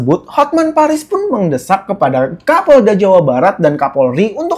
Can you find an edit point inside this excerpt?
no; 0 cuts

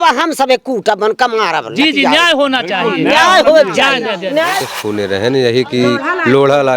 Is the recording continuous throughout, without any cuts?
no; 1 cut; at 4.6 s

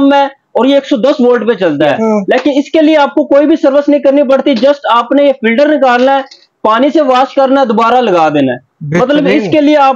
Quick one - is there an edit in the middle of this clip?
yes; 1 cut; at 1.9 s

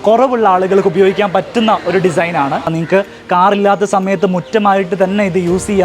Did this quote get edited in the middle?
yes; 1 cut; at 2.7 s

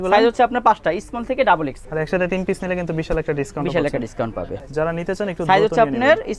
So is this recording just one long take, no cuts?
no; 2 cuts; at 1.8 s, 4.6 s

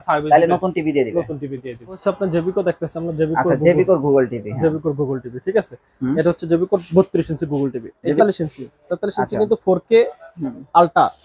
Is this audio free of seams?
no; 2 cuts; at 2.0 s, 8.2 s

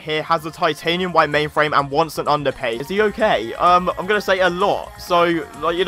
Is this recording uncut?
no; 1 cut; at 2.8 s

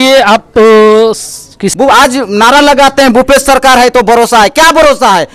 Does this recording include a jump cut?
yes; 1 cut; at 1.6 s

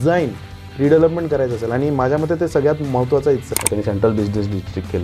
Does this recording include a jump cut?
yes; 1 cut; at 3.5 s

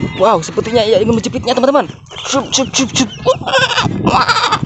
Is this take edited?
no; 0 cuts

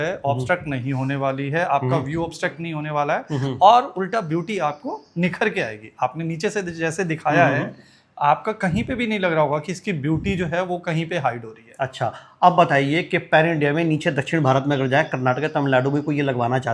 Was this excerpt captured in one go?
yes; 0 cuts

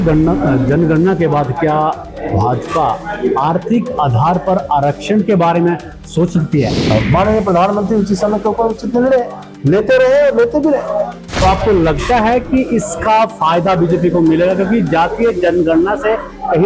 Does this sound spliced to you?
yes; 2 cuts; at 6.8 s, 11.2 s

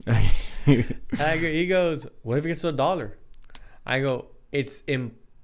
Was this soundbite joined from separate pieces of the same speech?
no; 0 cuts

